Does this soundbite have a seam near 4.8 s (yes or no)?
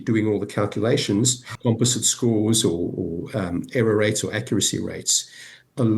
no